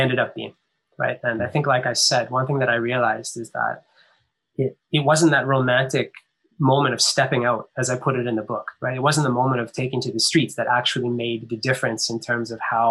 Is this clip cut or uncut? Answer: uncut